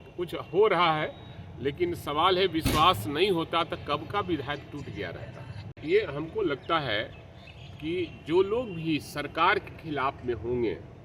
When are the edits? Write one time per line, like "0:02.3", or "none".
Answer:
0:05.7